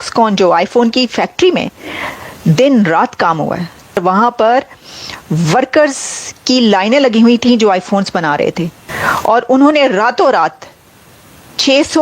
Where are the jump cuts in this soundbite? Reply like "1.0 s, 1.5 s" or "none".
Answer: 4.0 s, 8.8 s

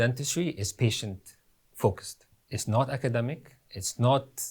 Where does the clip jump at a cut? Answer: none

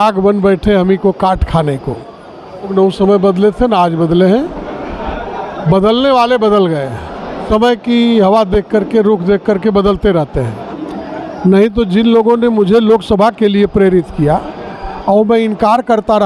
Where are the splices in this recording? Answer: 2.7 s, 7.4 s

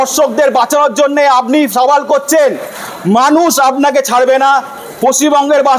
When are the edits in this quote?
none

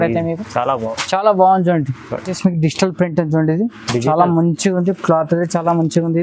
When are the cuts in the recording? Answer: none

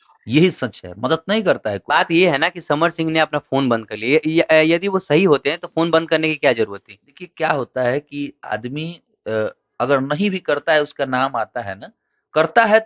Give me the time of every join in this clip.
1.8 s

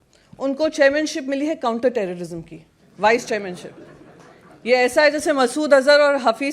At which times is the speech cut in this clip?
none

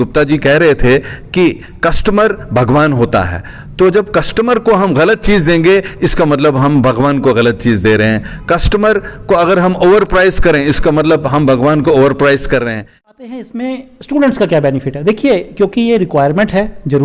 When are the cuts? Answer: 13.1 s

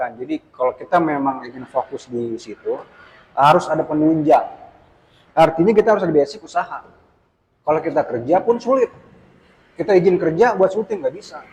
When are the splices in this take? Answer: none

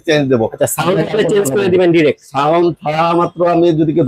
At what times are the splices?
none

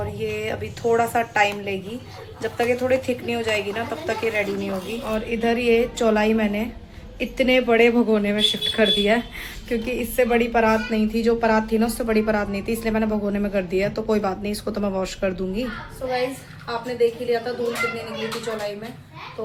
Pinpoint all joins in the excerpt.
none

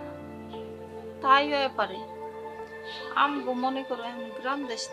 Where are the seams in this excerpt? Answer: 1.2 s

